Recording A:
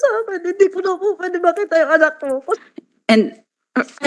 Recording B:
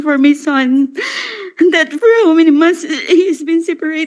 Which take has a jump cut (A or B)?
A